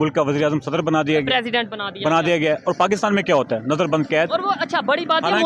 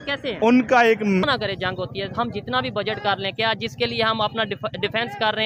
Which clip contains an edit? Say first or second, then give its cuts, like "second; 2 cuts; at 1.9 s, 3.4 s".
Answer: second; 1 cut; at 1.3 s